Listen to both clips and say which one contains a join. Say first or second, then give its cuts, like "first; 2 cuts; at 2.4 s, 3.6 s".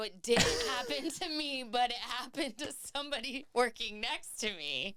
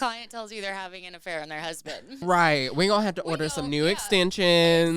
second; 1 cut; at 2.2 s